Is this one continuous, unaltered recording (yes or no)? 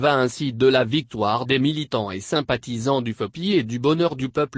yes